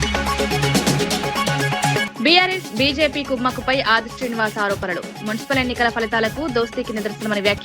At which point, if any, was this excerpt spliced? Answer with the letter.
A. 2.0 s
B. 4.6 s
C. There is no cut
A